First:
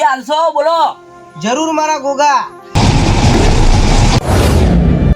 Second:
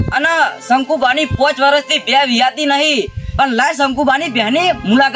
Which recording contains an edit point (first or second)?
first